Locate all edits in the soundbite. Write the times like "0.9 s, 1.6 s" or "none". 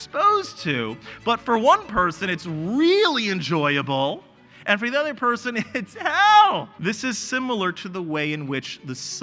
6.7 s

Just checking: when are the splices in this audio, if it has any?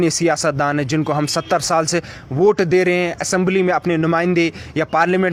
none

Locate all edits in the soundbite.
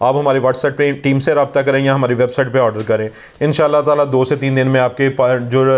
none

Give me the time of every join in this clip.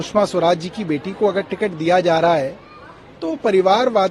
none

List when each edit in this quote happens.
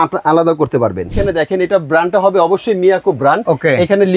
1.1 s, 3.4 s

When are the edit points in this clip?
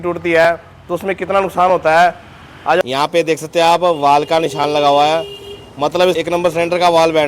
2.8 s, 6.2 s

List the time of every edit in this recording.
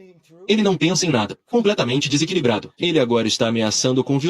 1.3 s, 2.7 s

